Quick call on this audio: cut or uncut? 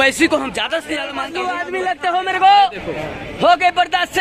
cut